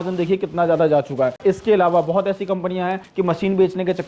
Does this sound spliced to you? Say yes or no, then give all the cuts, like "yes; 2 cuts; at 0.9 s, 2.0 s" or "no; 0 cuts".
yes; 2 cuts; at 1.4 s, 3.0 s